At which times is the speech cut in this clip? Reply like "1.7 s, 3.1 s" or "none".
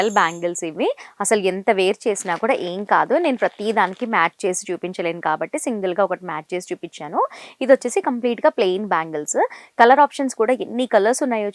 none

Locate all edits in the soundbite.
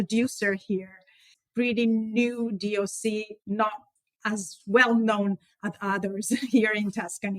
1.3 s

